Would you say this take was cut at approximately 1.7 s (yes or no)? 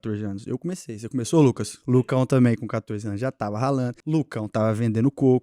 yes